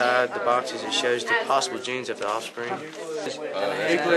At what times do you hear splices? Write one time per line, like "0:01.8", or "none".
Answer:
0:03.3

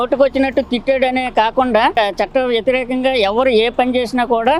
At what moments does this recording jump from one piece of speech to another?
none

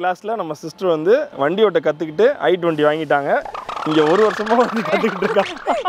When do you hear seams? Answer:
none

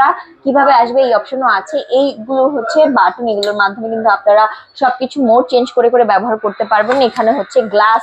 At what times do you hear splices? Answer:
none

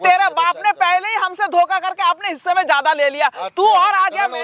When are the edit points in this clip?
none

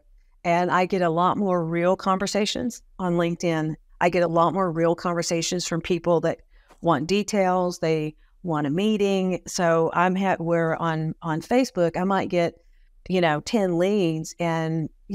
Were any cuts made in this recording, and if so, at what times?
0:03.8

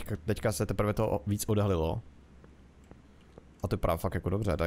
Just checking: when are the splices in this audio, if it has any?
none

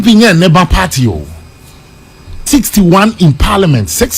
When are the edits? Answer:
0:02.4

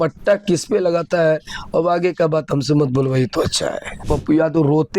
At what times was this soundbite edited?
0:04.1

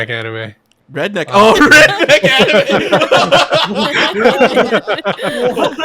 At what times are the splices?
none

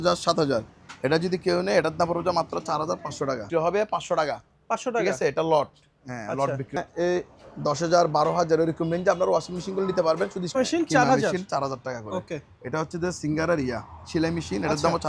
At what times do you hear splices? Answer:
0:03.4
0:06.8
0:10.4

